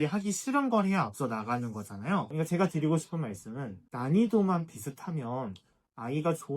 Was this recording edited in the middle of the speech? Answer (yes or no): yes